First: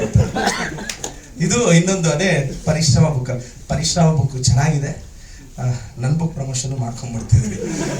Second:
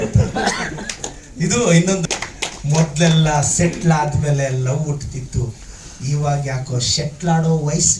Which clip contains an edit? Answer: second; 1 cut; at 2.0 s

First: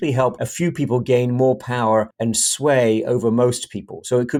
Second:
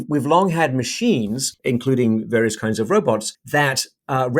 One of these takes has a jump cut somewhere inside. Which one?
second; 2 cuts; at 1.5 s, 3.3 s

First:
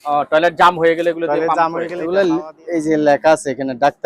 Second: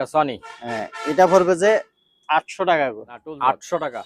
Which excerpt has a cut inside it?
first; 1 cut; at 1.9 s

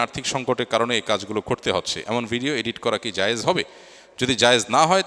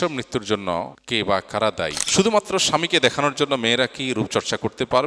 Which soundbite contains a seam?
second; 2 cuts; at 1.0 s, 2.0 s

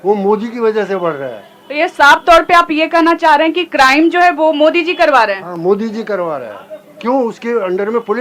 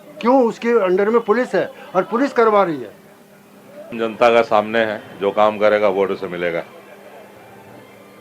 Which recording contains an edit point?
second; 1 cut; at 3.9 s

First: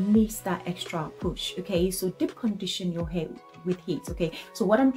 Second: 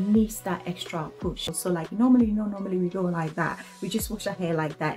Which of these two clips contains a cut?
second; 1 cut; at 1.6 s

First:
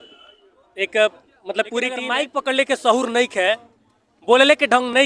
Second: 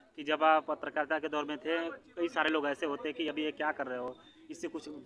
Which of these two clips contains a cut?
first; 1 cut; at 2.1 s

